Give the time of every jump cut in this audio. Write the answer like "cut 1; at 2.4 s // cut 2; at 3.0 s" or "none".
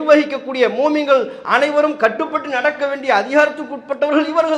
none